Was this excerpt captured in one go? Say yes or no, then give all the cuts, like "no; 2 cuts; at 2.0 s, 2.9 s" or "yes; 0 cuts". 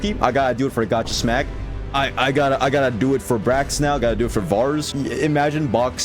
no; 1 cut; at 4.9 s